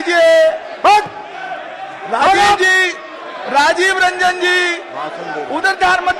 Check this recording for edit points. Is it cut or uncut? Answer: uncut